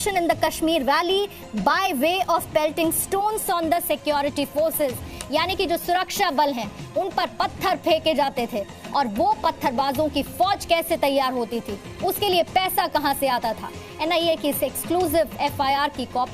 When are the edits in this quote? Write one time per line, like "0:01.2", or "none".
0:08.5